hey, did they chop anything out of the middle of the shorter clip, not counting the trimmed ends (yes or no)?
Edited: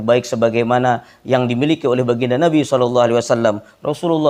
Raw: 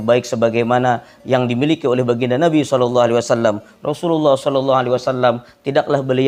no